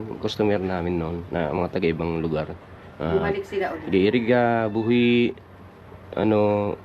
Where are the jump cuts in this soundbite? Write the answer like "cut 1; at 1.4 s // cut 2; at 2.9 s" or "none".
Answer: none